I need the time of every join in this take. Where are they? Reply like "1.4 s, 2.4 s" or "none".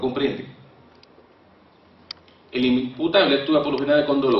none